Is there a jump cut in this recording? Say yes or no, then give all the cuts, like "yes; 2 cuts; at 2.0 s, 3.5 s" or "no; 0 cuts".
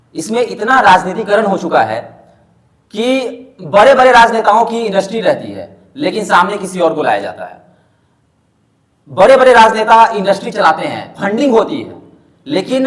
no; 0 cuts